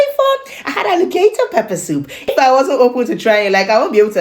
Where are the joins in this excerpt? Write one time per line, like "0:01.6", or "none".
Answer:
0:02.3